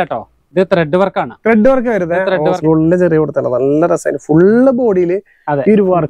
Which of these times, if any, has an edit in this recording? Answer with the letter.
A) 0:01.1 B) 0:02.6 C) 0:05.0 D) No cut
B